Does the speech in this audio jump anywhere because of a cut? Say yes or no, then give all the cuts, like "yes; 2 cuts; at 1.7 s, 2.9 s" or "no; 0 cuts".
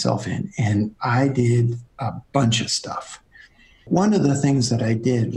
yes; 1 cut; at 3.9 s